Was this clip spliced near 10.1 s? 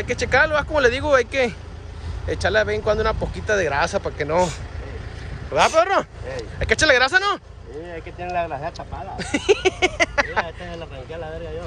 no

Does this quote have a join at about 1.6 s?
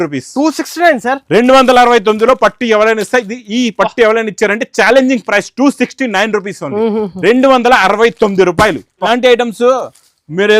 no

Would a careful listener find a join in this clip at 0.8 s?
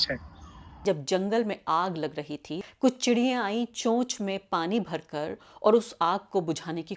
yes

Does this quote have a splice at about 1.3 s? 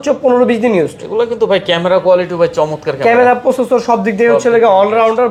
no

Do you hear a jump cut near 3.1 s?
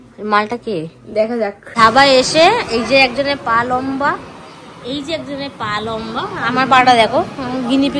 no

